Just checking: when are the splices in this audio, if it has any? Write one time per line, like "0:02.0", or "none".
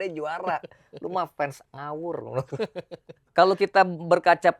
0:03.2